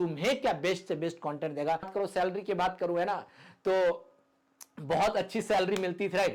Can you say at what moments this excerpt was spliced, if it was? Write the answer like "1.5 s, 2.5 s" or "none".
1.9 s